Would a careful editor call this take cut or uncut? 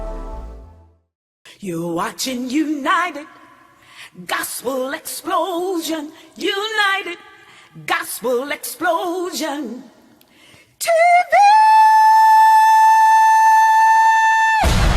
cut